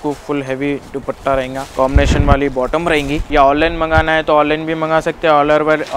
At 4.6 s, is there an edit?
no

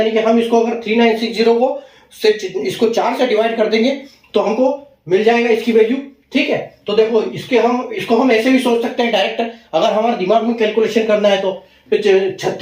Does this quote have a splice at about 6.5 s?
no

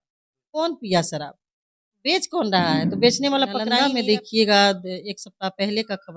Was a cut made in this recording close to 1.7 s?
no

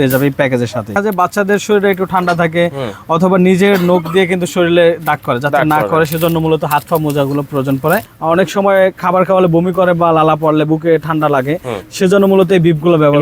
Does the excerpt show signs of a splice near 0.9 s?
yes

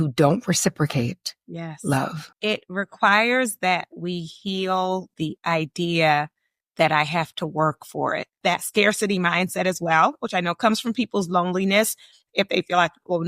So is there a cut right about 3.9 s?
no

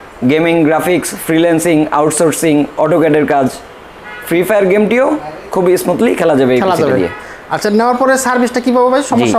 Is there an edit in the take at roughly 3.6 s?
no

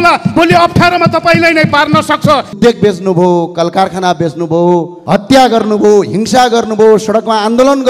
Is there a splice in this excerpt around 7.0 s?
no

